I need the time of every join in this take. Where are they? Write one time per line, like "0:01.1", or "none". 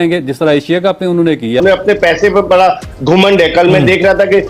0:01.6